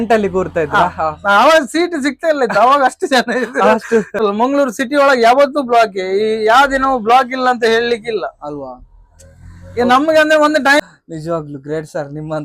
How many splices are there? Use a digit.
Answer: 2